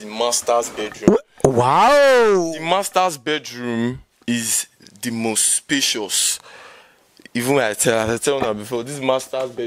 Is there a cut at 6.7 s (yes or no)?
no